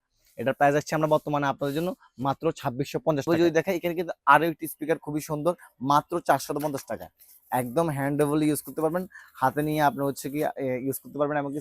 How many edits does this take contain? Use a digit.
1